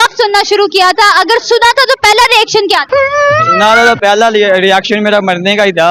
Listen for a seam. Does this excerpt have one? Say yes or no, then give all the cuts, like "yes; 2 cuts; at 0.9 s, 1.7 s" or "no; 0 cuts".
no; 0 cuts